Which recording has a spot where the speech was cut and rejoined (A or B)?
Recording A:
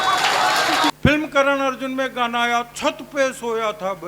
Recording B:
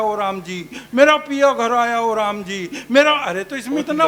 A